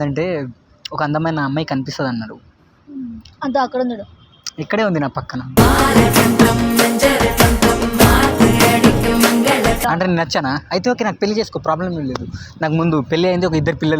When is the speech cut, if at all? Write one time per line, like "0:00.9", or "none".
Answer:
0:09.8